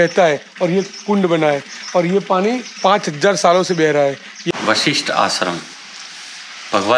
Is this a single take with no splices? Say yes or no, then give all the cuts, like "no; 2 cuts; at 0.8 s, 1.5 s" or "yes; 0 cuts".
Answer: no; 1 cut; at 4.4 s